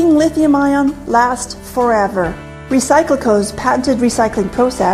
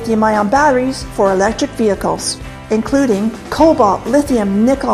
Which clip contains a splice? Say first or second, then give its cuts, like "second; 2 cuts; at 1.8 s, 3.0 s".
first; 1 cut; at 1.4 s